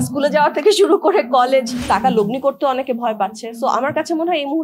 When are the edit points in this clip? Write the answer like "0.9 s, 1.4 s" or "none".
1.8 s